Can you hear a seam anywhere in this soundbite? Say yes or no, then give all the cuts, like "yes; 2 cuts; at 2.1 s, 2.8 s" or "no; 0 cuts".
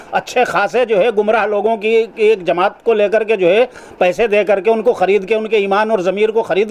no; 0 cuts